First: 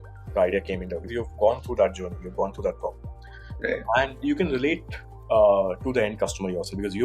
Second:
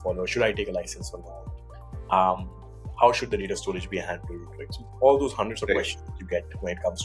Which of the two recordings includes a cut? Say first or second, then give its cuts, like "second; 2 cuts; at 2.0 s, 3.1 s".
first; 1 cut; at 1.1 s